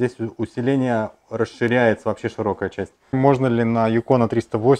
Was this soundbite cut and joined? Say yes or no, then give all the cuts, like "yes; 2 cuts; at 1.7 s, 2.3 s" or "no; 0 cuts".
yes; 1 cut; at 3.2 s